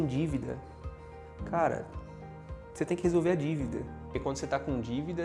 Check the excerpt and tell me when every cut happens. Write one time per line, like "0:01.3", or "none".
0:04.2